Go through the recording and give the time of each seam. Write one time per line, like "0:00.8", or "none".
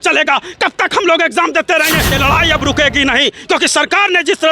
0:02.1

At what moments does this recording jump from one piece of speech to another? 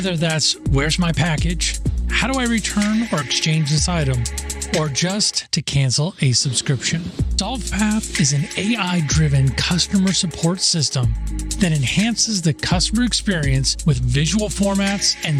none

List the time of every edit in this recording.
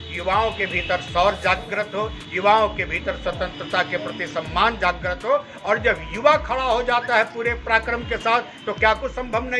none

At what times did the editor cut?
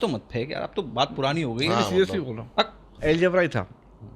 0:02.9

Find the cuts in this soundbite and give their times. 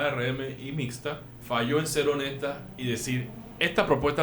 0:01.3

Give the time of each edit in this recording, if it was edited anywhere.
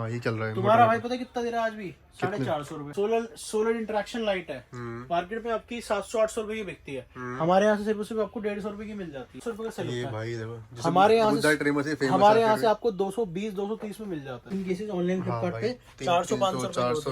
0:02.8
0:09.4
0:14.5

